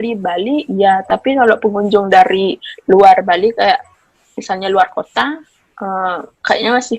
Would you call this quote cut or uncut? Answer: uncut